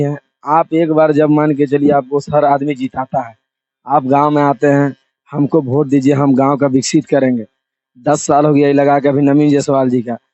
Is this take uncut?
yes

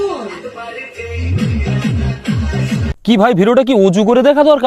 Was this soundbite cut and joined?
no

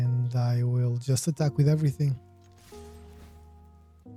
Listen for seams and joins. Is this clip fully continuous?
yes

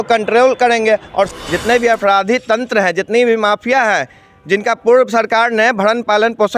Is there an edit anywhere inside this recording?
yes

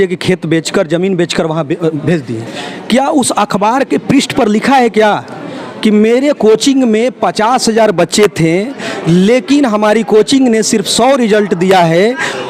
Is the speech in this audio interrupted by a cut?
no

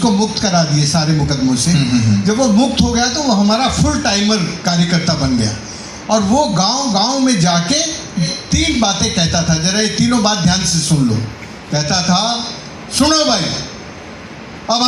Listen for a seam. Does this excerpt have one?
yes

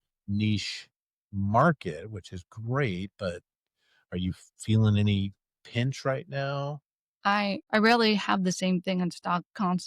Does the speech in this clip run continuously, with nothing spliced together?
no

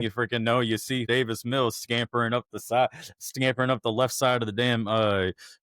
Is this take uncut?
no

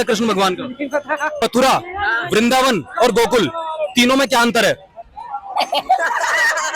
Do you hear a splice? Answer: yes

